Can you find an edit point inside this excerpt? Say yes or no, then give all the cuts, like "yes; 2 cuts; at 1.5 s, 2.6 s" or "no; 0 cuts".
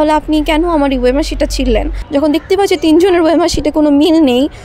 yes; 1 cut; at 2.0 s